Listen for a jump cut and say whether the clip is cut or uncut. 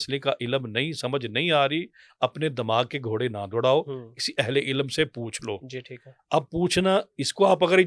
uncut